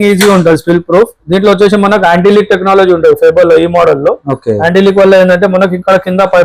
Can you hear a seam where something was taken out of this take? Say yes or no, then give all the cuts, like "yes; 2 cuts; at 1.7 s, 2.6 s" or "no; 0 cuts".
no; 0 cuts